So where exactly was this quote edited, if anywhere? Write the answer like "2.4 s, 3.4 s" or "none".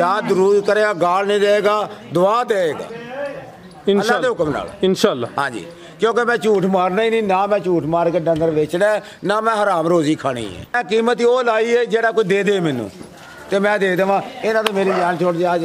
10.8 s